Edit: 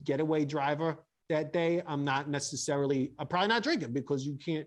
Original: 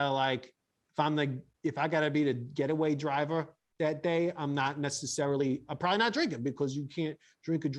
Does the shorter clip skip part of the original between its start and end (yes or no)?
no